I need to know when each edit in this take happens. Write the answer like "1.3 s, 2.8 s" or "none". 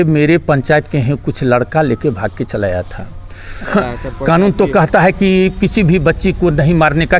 3.7 s